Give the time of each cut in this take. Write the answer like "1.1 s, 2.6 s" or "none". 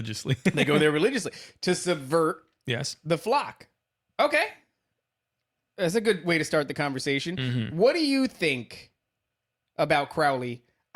none